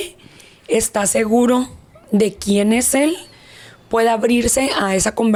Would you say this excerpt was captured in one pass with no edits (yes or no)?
yes